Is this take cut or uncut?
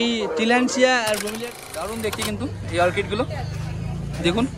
cut